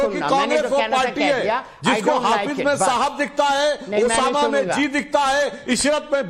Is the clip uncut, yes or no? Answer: no